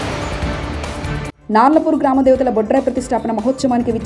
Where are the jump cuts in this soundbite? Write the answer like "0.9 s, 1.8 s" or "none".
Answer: 1.3 s